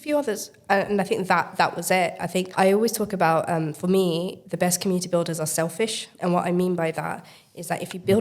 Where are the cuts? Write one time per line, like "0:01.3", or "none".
0:04.4
0:06.1